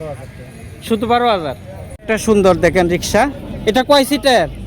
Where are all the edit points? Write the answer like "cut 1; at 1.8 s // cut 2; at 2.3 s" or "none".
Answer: cut 1; at 2.1 s